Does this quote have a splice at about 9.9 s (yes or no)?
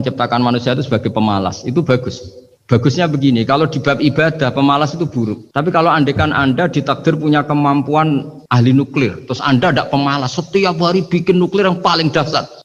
no